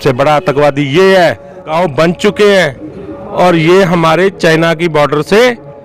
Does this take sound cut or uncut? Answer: cut